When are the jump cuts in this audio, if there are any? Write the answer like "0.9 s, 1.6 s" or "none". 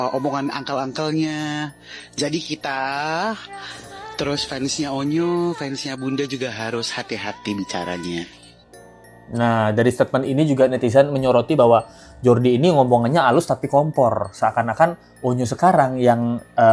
none